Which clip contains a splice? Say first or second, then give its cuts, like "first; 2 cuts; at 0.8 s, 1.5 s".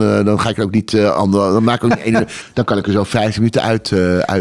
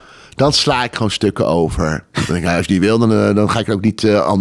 first; 1 cut; at 2.4 s